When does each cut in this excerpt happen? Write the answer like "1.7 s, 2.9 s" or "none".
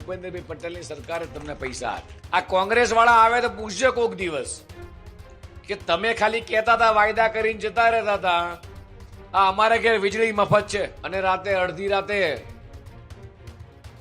2.1 s, 11.0 s